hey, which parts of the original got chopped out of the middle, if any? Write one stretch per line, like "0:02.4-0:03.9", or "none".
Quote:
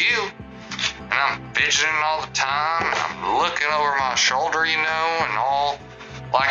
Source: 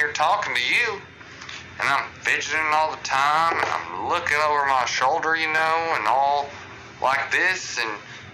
none

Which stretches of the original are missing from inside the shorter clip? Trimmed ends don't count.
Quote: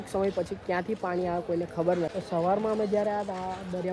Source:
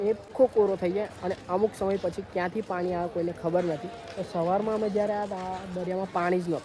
0:03.8-0:04.2

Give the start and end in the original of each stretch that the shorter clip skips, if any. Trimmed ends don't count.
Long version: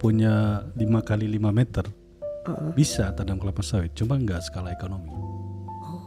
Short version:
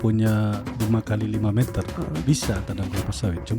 0:01.9-0:02.4

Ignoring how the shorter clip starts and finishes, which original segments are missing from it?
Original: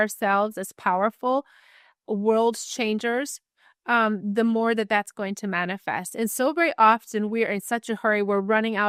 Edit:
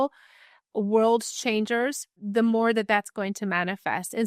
0:03.5-0:04.2

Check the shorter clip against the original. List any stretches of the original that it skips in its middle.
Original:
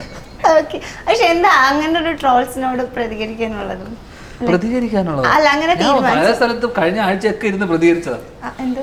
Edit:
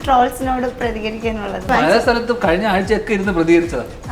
0:03.8-0:06.0

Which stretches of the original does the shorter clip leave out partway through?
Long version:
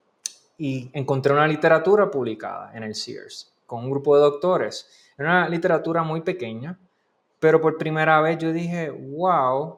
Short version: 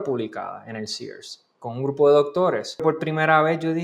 0:04.9-0:07.6

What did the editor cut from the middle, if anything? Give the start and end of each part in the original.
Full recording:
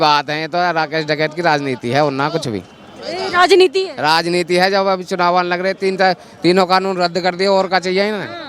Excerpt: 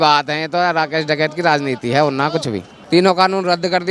0:02.8-0:06.3

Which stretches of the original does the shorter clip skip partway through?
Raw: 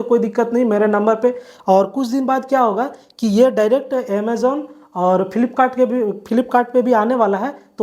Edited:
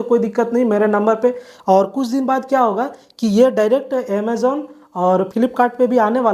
0:05.3-0:06.2

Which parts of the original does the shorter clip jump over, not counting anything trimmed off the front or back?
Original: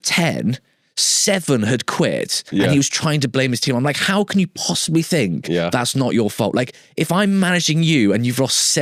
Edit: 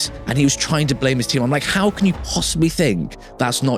none

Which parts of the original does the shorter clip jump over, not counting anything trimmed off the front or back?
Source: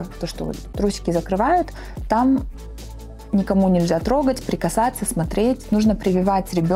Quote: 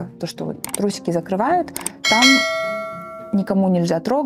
none

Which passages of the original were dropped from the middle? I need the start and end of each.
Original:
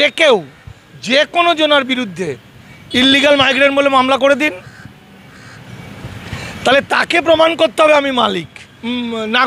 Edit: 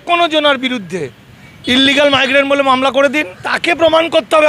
0:04.8-0:07.0

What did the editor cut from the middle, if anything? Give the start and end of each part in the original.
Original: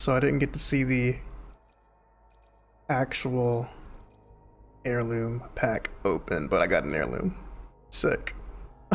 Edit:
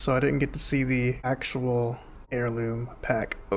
0:01.2-0:03.0
0:03.8-0:04.6

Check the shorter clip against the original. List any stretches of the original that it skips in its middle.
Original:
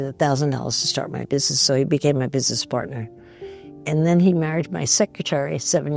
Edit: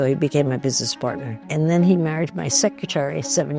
0:03.0-0:03.7

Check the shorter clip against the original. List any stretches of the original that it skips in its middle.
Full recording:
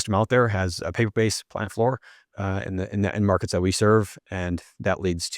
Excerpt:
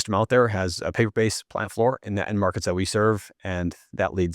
0:02.0-0:02.9

